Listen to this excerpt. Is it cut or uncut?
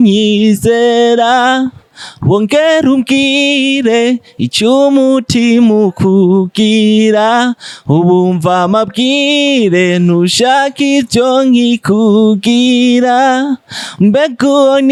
uncut